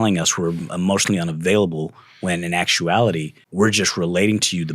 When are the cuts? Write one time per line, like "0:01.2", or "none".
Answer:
0:03.4